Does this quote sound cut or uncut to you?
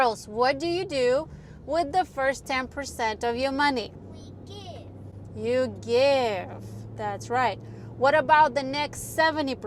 uncut